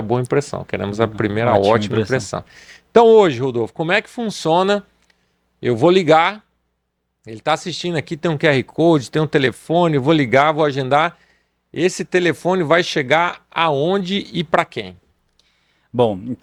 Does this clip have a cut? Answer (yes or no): no